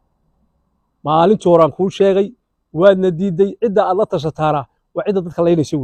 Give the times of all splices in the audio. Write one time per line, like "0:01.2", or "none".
none